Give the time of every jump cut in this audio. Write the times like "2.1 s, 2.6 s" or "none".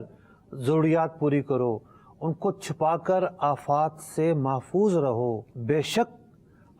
5.5 s